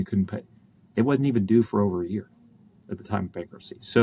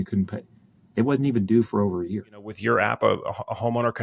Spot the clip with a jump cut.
second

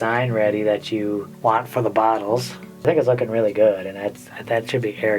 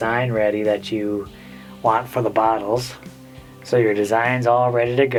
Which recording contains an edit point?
first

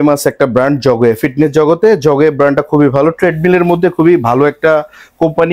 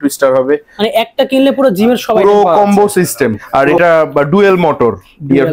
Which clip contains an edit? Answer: second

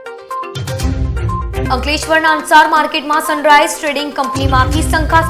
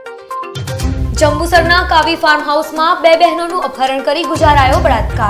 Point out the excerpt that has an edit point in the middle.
first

